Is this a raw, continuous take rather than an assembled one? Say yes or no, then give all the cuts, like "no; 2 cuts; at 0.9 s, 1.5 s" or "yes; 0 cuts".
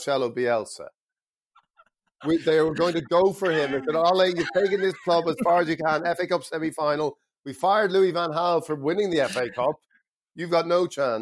yes; 0 cuts